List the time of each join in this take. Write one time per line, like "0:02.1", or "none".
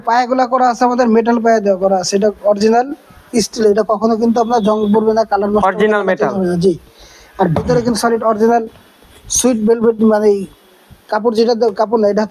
none

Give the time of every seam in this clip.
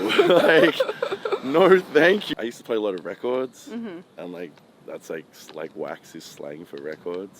0:02.3

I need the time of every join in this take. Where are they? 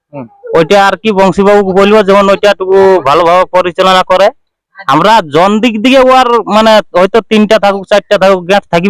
none

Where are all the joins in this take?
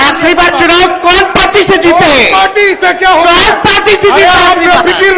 none

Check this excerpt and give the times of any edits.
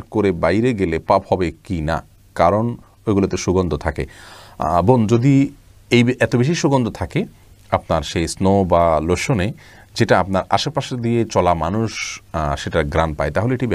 none

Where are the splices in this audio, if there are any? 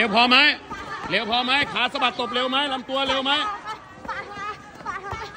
none

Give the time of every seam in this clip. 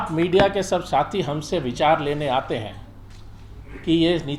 none

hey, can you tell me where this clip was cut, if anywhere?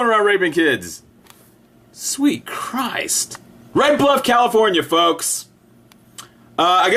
none

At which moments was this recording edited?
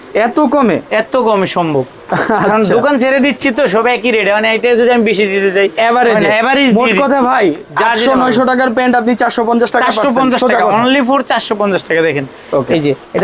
none

